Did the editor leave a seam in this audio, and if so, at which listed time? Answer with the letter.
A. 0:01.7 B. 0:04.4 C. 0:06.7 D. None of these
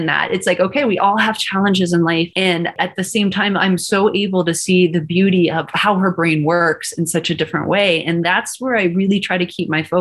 D